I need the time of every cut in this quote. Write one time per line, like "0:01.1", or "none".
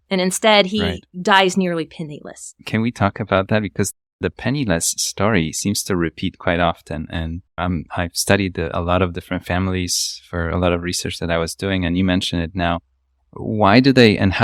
none